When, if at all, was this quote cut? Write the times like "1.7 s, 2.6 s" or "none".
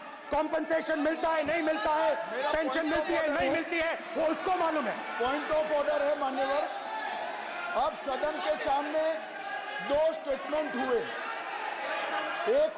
none